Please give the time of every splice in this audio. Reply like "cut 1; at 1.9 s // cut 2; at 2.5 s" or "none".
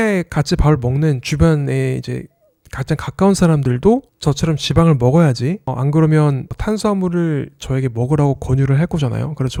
none